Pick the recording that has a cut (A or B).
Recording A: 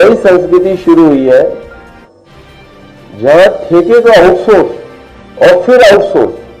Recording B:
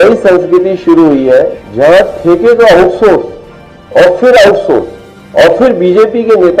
B